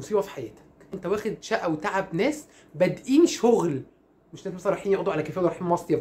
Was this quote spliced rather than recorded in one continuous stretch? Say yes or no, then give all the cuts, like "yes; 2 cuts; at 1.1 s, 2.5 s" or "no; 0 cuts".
yes; 1 cut; at 0.9 s